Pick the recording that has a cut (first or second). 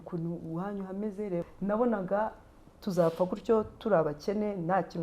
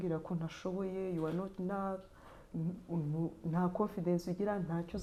first